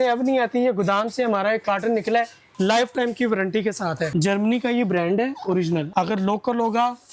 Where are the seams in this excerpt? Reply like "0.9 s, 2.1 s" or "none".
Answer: 2.4 s, 4.1 s, 5.9 s